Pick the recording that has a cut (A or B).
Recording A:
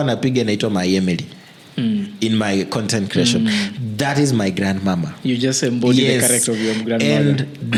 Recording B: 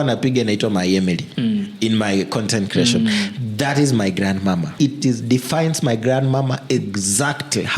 B